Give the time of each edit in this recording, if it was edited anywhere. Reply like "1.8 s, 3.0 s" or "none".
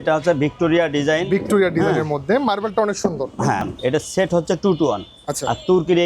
3.7 s